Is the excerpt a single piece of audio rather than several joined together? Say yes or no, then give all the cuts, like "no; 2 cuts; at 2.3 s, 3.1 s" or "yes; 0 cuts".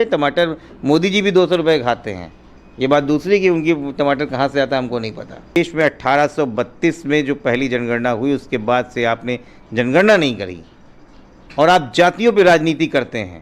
no; 1 cut; at 5.6 s